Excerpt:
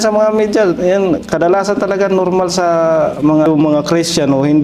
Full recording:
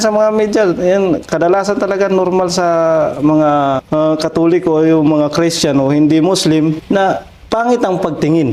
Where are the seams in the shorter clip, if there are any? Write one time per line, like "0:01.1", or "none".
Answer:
0:03.5